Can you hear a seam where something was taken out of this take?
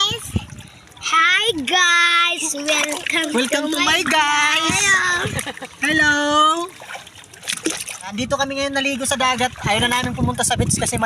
yes; 1 cut; at 8.1 s

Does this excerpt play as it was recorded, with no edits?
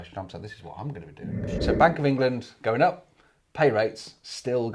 no; 1 cut; at 1.6 s

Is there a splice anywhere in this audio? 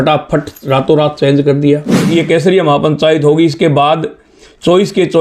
yes; 1 cut; at 2.0 s

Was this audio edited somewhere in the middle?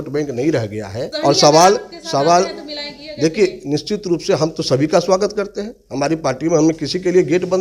yes; 1 cut; at 1.1 s

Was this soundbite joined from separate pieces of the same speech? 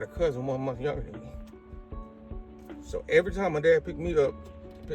yes; 2 cuts; at 1.0 s, 2.9 s

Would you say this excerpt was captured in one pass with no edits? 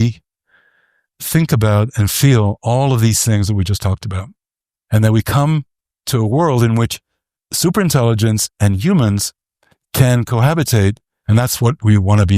no; 1 cut; at 11.1 s

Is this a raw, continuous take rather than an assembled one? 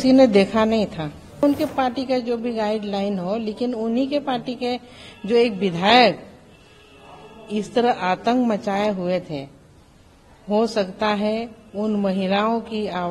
no; 1 cut; at 1.4 s

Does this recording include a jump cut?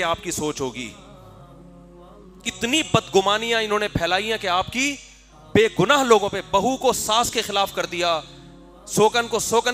no; 0 cuts

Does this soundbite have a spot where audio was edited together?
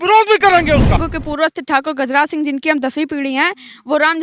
yes; 1 cut; at 1.0 s

